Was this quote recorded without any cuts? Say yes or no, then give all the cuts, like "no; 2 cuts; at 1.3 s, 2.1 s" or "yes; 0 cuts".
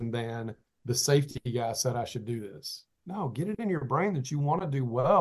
yes; 0 cuts